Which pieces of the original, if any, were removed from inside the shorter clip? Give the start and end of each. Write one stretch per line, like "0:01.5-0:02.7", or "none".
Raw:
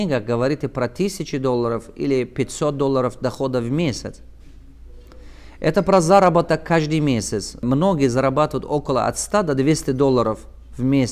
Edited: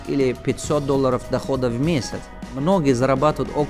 0:04.5-0:07.7